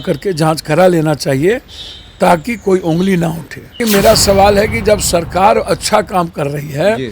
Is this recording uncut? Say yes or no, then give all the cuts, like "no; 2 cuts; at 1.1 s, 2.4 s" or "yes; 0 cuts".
no; 1 cut; at 3.8 s